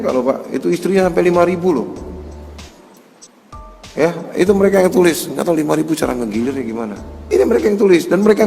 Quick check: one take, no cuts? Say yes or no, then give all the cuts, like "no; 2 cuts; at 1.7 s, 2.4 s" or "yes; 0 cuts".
no; 1 cut; at 7.0 s